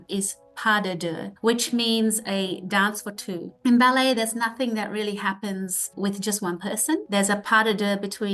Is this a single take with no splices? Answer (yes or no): yes